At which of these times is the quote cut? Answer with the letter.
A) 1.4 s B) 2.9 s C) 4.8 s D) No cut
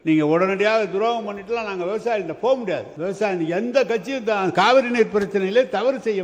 B